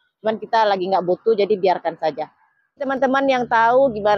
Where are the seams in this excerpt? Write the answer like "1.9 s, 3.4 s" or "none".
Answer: 2.8 s